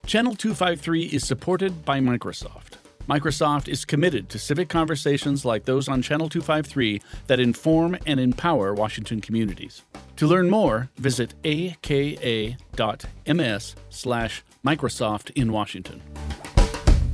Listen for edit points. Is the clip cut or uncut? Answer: uncut